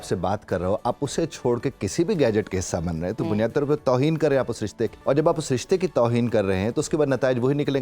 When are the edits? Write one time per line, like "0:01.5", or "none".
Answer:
0:05.0

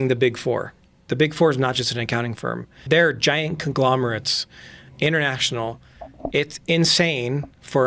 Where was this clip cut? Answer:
0:01.1
0:02.9

